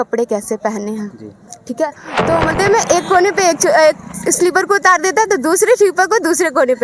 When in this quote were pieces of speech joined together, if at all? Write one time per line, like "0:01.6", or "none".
0:02.5